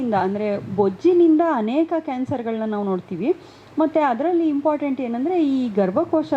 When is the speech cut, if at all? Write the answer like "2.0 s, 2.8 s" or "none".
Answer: none